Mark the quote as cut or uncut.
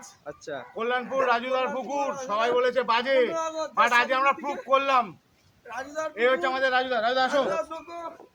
uncut